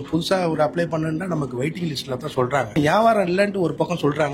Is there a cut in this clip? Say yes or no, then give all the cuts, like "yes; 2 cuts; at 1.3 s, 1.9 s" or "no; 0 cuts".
yes; 1 cut; at 2.8 s